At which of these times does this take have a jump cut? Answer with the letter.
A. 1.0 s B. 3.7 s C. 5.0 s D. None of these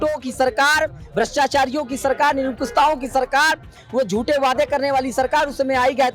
D